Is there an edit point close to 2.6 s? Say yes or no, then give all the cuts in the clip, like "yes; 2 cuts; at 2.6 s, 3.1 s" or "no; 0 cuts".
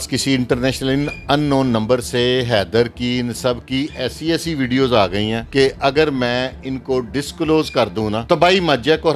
no; 2 cuts; at 5.4 s, 8.2 s